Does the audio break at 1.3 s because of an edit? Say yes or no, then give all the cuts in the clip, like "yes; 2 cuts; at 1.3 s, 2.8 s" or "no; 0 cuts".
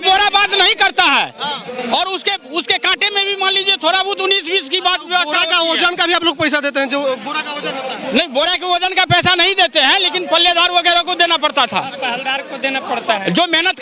no; 0 cuts